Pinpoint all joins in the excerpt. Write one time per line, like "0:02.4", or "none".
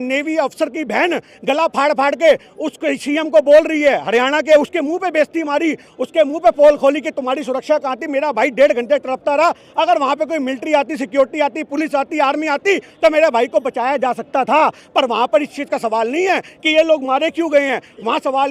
none